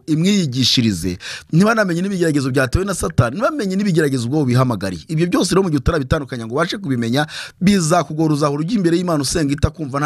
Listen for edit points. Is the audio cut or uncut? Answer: uncut